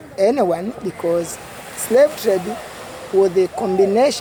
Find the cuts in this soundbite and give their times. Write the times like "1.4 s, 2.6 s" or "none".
none